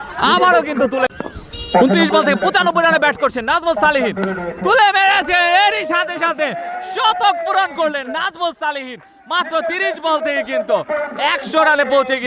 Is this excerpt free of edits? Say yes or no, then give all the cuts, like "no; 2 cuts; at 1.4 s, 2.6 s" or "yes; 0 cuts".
no; 1 cut; at 1.1 s